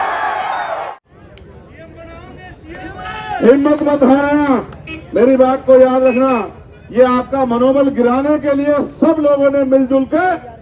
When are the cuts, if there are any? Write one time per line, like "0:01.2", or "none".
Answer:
0:00.9